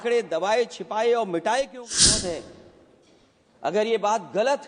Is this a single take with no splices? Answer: no; 1 cut; at 1.8 s

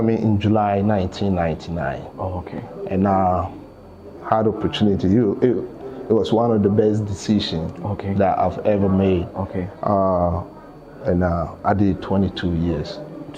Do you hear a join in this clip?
no; 0 cuts

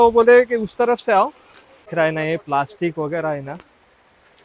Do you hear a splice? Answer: yes; 1 cut; at 1.9 s

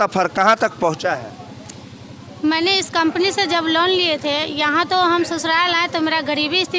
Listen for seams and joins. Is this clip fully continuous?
yes; 0 cuts

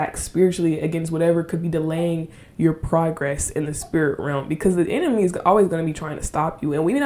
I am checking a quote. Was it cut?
no; 0 cuts

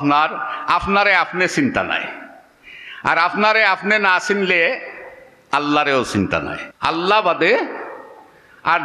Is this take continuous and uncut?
no; 1 cut; at 6.7 s

